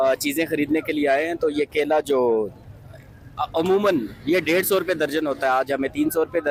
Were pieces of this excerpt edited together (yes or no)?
no